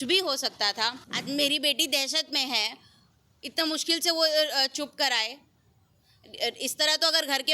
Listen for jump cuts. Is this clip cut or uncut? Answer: cut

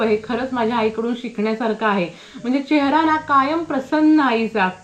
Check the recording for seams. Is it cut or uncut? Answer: uncut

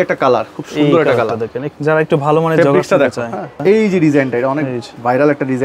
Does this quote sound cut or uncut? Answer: cut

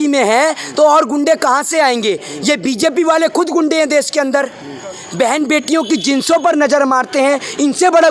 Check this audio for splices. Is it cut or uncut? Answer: uncut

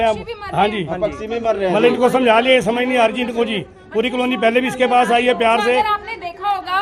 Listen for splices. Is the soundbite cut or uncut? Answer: uncut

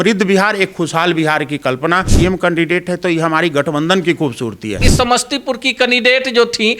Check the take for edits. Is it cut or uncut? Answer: cut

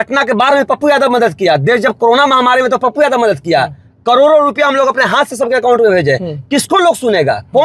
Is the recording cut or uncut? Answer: uncut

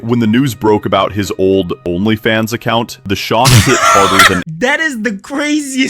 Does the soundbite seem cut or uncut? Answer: cut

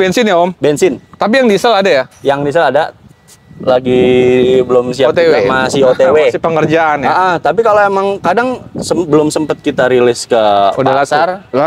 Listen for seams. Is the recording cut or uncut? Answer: uncut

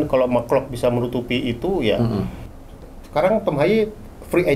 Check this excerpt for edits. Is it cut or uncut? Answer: cut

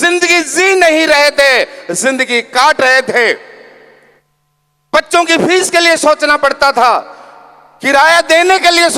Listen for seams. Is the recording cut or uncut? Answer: uncut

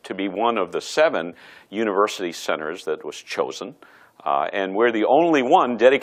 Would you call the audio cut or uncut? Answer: uncut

